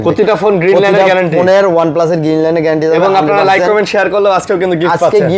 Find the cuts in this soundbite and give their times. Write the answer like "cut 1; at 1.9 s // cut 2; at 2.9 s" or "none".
none